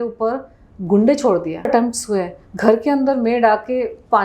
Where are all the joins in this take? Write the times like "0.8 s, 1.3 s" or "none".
none